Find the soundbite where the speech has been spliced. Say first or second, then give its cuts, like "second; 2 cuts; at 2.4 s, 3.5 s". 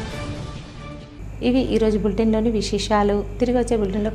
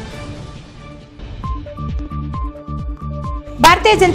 second; 2 cuts; at 1.3 s, 3.1 s